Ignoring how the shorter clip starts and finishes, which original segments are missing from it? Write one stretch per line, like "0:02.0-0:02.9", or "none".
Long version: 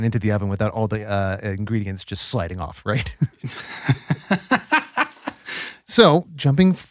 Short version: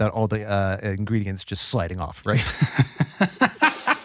0:03.3-0:03.8